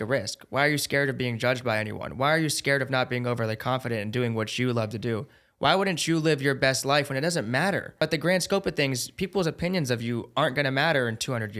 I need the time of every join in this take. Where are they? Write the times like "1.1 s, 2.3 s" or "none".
8.0 s